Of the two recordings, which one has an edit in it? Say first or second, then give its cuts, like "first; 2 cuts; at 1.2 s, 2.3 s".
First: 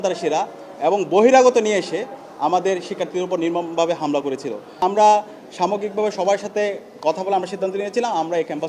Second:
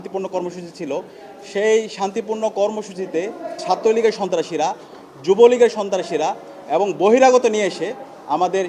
first; 1 cut; at 4.8 s